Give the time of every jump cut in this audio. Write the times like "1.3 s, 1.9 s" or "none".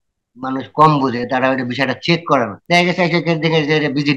2.6 s

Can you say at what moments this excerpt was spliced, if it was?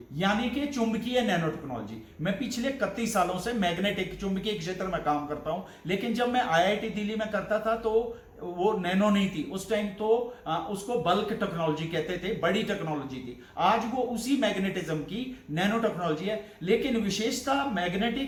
none

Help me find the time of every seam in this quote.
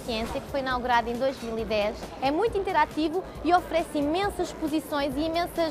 2.0 s

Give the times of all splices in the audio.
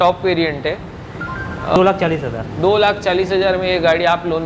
1.8 s

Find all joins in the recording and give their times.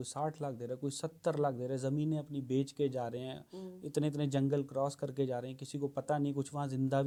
none

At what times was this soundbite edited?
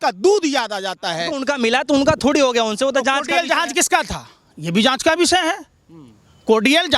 1.4 s

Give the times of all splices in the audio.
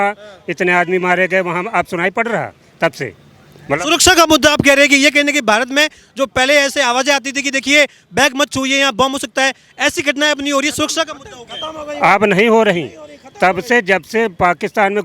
none

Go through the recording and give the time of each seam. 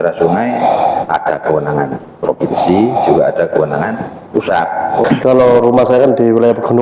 5.0 s

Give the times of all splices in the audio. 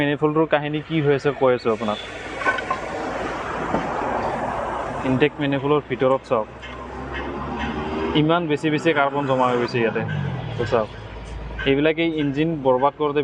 none

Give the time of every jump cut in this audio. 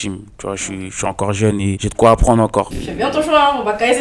2.7 s

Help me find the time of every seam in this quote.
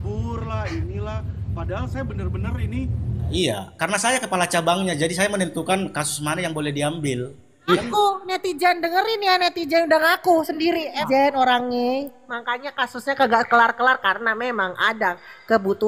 3.3 s, 7.7 s, 11.0 s

